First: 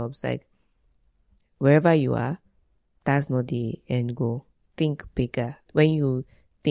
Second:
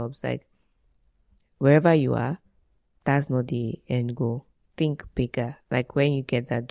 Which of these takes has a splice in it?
first; 1 cut; at 5.6 s

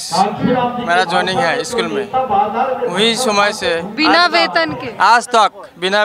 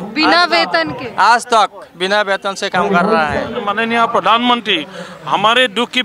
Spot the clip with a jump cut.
second; 1 cut; at 3.6 s

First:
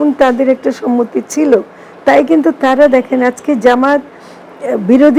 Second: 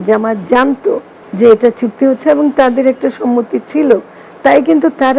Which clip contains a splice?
second; 1 cut; at 1.2 s

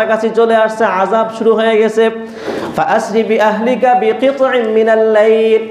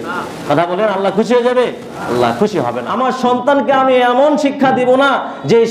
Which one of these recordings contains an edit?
second; 1 cut; at 2.8 s

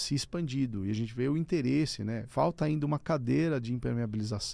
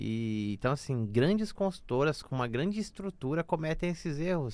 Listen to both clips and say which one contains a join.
first; 1 cut; at 2.2 s

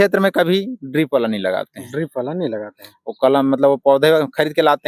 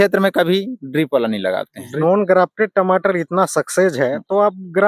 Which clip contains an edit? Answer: second; 1 cut; at 1.8 s

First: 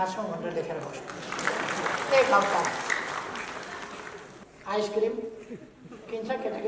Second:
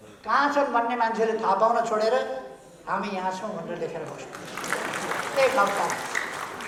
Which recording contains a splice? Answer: first; 1 cut; at 4.4 s

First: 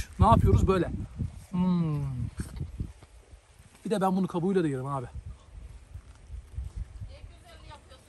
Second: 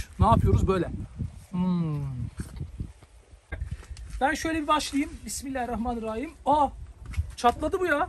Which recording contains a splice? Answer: second; 1 cut; at 3.7 s

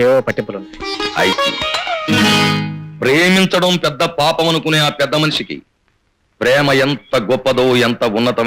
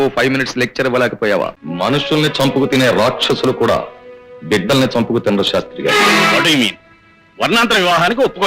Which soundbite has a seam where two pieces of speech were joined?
second; 1 cut; at 1.6 s

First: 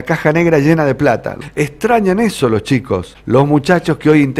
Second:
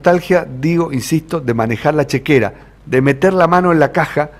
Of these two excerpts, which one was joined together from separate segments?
first; 2 cuts; at 1.3 s, 3.1 s

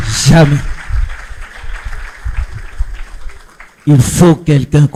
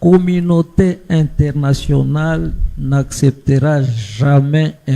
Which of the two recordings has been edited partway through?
second; 1 cut; at 1.0 s

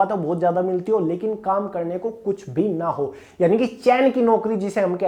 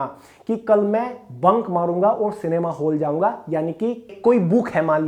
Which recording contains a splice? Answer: second; 1 cut; at 4.1 s

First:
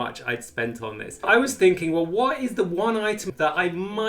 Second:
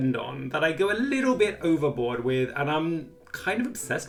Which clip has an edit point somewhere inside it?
first; 2 cuts; at 1.2 s, 3.2 s

